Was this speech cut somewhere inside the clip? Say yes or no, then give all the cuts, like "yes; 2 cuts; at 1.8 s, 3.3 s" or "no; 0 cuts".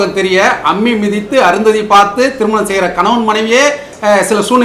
no; 0 cuts